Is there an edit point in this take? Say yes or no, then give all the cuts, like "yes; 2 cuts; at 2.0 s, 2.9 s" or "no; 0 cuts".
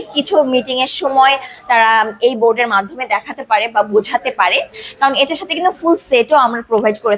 no; 0 cuts